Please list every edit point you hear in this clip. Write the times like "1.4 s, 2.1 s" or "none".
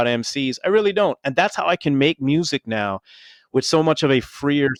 none